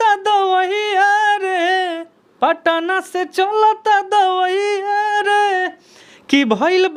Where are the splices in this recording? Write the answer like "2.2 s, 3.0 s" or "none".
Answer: none